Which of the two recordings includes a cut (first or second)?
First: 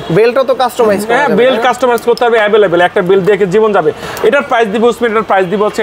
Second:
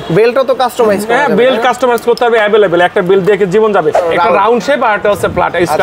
second